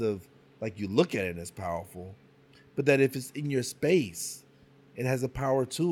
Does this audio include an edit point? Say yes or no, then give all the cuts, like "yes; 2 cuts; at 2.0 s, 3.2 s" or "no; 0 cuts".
no; 0 cuts